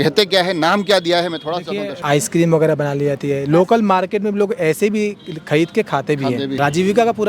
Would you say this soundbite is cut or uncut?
cut